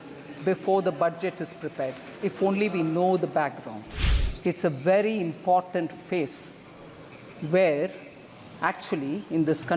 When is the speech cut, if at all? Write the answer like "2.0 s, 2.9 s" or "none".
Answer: 3.9 s